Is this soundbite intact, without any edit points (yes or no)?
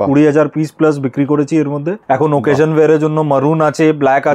no